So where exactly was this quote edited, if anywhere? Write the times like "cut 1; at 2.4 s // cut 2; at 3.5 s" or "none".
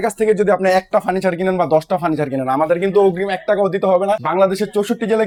none

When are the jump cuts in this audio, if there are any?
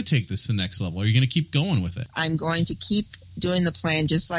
cut 1; at 2.0 s

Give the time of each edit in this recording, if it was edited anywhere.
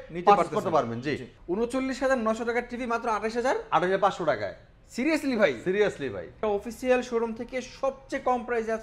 cut 1; at 1.2 s // cut 2; at 6.4 s

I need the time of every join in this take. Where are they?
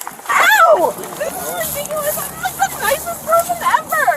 cut 1; at 1.1 s

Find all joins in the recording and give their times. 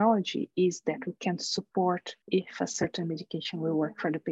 cut 1; at 2.1 s

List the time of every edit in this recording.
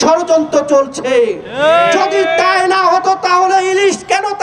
none

